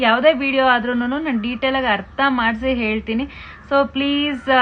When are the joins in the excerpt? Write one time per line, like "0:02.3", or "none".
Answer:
none